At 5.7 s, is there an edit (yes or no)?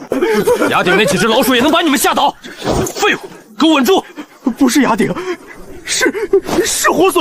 no